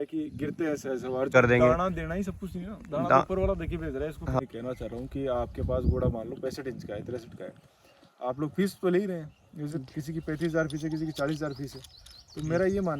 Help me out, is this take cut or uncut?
cut